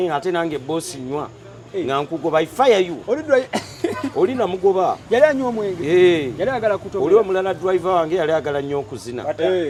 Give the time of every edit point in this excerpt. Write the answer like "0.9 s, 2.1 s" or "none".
none